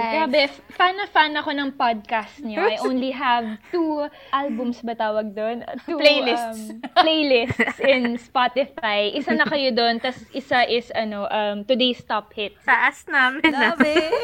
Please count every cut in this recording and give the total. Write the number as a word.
two